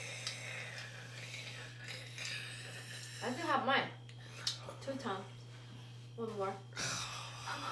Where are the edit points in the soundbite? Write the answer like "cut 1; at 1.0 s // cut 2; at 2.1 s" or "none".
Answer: none